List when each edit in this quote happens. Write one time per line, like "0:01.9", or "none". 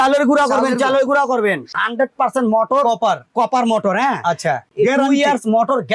0:01.8
0:04.6